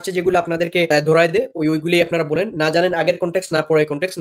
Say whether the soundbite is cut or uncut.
uncut